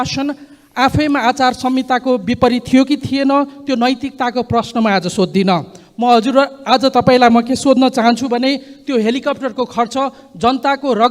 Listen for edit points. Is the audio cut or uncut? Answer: uncut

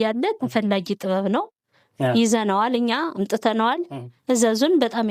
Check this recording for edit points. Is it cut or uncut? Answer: uncut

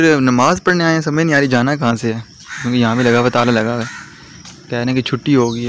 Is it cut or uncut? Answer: uncut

